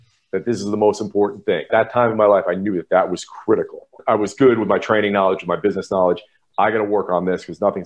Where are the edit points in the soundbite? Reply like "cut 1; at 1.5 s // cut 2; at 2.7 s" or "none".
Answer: cut 1; at 1.7 s // cut 2; at 3.9 s